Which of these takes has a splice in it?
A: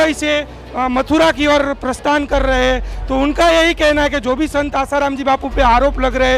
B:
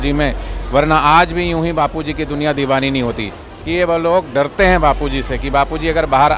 B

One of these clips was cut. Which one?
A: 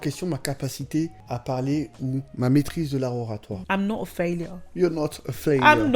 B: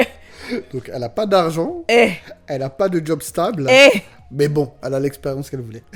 A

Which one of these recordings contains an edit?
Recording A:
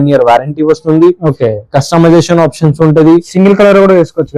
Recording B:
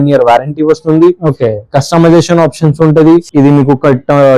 B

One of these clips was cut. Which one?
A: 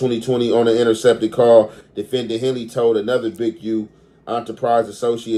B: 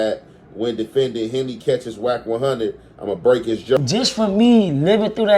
B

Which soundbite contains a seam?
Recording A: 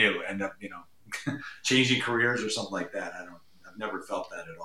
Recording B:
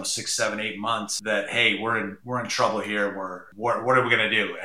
B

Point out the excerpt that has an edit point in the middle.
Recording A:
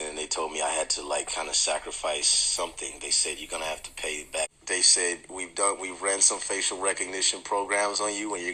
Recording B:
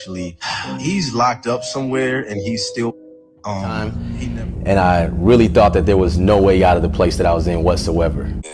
B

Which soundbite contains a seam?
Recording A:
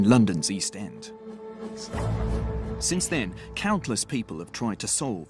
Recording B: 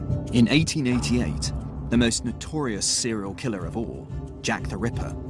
B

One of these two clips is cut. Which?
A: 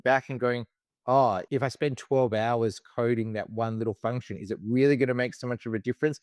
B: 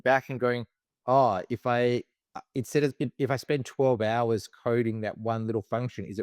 A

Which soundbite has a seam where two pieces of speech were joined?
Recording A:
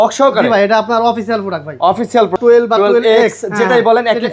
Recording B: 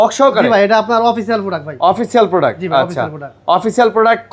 A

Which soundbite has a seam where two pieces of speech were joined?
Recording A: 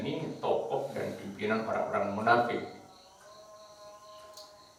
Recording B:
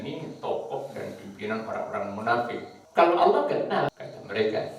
B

